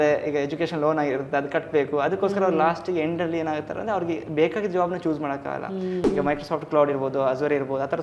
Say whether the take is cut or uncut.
cut